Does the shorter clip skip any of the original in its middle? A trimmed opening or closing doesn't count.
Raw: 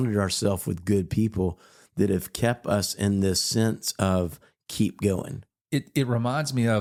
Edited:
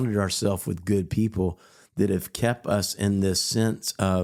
no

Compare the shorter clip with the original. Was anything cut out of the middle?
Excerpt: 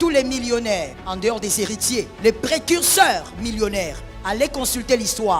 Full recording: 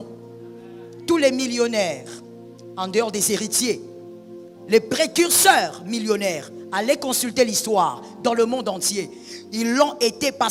yes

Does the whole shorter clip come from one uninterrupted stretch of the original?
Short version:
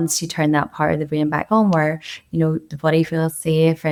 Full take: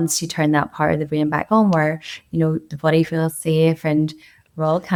yes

